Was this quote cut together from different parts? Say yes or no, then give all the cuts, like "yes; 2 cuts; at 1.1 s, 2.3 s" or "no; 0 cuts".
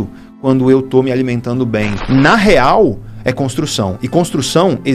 yes; 1 cut; at 2.0 s